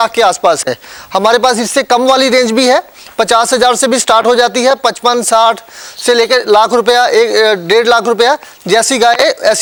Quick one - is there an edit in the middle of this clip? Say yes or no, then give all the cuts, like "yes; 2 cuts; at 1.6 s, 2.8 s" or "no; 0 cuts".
no; 0 cuts